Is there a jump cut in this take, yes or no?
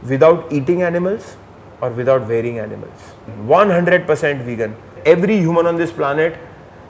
yes